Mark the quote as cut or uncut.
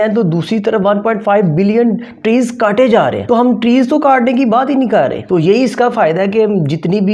cut